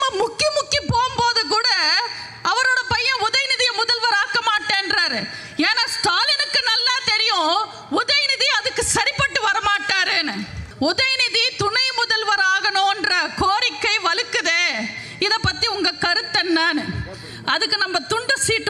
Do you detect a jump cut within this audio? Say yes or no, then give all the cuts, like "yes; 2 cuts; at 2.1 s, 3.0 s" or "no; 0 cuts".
yes; 1 cut; at 10.6 s